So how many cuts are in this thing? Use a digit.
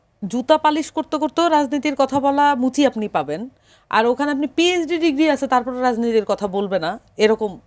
0